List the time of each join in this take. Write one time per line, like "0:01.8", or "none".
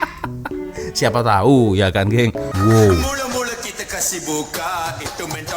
0:02.5